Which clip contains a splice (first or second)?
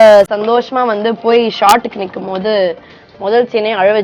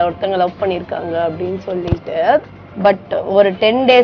second